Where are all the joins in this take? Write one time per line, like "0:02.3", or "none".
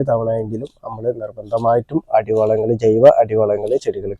none